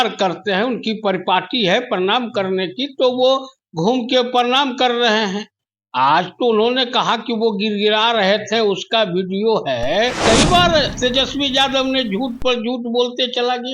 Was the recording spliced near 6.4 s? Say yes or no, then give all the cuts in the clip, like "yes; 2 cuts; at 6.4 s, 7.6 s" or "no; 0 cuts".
no; 1 cut; at 10.2 s